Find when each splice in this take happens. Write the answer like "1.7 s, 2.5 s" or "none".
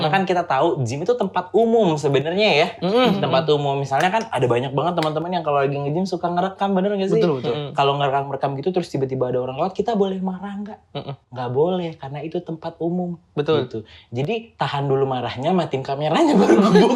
none